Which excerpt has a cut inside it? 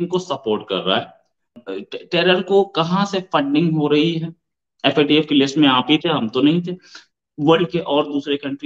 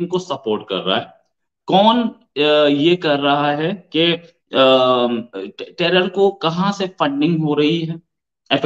first; 1 cut; at 1.6 s

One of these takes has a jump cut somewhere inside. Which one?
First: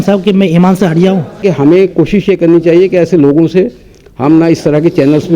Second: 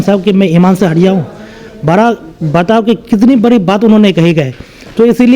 first; 1 cut; at 1.4 s

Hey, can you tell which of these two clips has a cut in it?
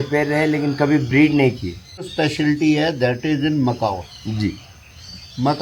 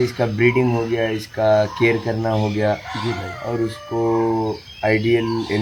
first; 1 cut; at 2.1 s

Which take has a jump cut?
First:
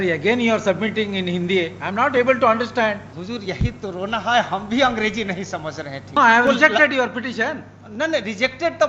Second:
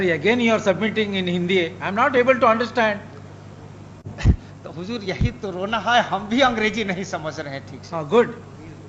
first; 2 cuts; at 3.1 s, 6.2 s

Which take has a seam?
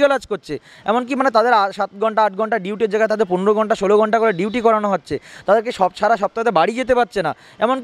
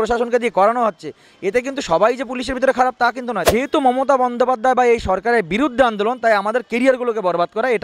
second; 1 cut; at 3.4 s

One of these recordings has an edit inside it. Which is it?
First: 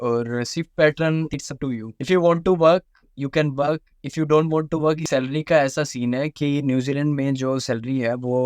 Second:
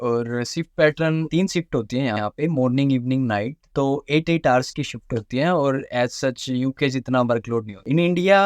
first; 2 cuts; at 1.3 s, 5.0 s

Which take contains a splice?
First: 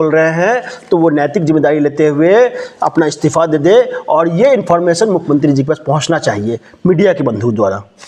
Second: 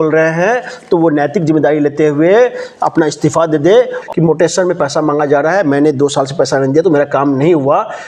second; 1 cut; at 4.0 s

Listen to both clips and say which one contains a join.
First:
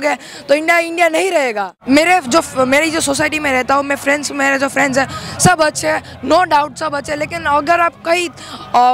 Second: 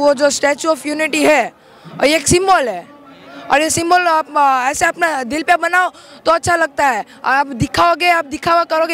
first; 1 cut; at 1.8 s

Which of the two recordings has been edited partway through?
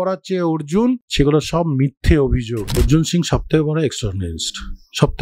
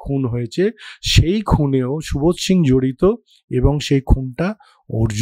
first; 2 cuts; at 1.1 s, 2.8 s

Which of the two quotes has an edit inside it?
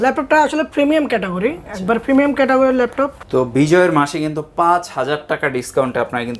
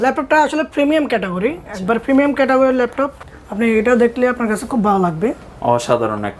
first; 1 cut; at 3.2 s

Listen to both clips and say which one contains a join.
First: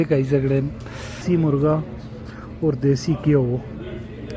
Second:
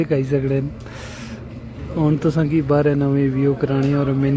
first; 1 cut; at 1.2 s

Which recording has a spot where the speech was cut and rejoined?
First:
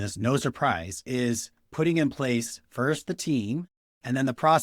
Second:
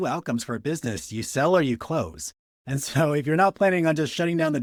first; 1 cut; at 0.9 s

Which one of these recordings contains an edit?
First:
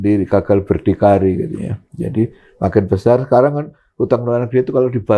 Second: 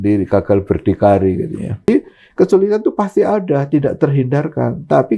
second; 1 cut; at 1.8 s

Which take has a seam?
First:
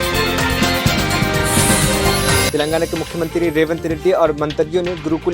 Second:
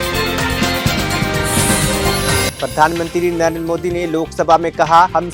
first; 1 cut; at 2.5 s

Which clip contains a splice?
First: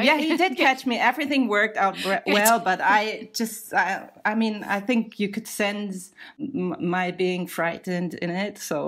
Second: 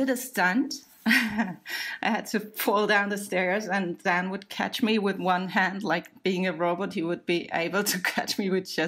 first; 1 cut; at 6.3 s

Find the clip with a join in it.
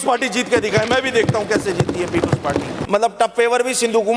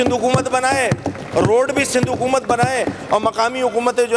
first; 1 cut; at 2.7 s

